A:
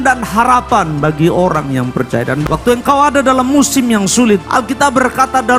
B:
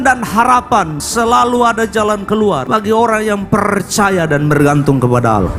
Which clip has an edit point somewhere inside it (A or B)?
B